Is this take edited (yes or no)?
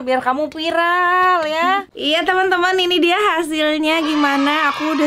yes